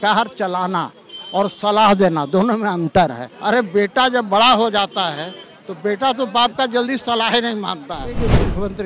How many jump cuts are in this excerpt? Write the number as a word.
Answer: two